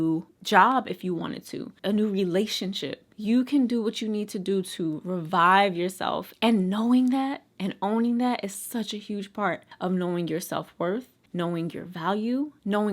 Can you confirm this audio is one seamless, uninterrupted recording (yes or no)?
no